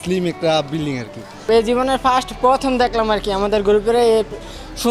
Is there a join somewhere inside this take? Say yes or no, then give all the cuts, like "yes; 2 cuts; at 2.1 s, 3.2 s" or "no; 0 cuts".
yes; 1 cut; at 1.4 s